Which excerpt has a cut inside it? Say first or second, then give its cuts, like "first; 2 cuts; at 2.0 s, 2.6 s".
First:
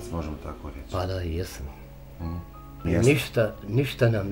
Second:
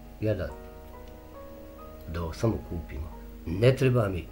first; 1 cut; at 2.8 s